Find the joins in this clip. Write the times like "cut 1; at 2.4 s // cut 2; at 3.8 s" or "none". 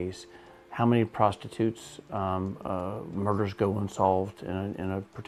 none